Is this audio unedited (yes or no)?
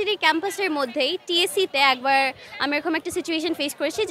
yes